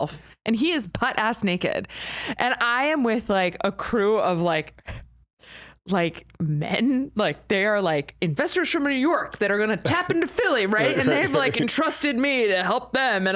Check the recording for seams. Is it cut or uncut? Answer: uncut